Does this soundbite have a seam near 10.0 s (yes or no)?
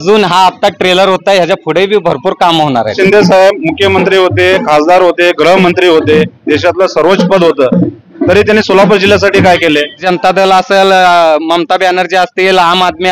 yes